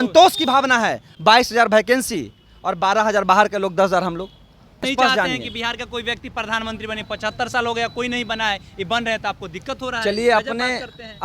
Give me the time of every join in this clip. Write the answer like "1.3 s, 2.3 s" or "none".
1.0 s, 4.9 s